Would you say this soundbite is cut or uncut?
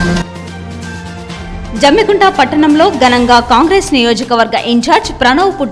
cut